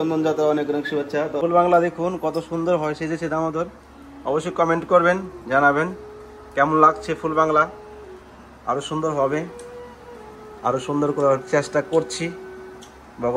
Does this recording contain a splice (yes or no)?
yes